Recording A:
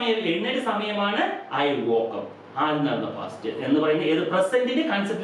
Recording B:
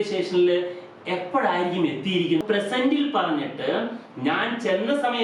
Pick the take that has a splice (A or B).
B